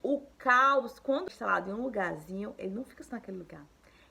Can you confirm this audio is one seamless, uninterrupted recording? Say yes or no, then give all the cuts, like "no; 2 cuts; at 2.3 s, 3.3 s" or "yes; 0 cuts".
no; 1 cut; at 1.2 s